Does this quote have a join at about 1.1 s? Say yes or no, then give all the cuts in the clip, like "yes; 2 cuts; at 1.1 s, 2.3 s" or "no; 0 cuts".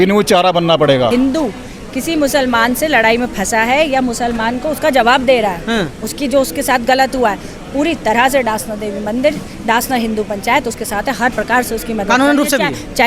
yes; 1 cut; at 1.1 s